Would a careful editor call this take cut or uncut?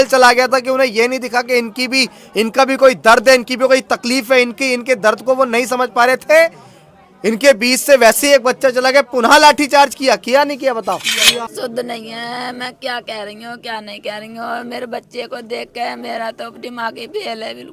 cut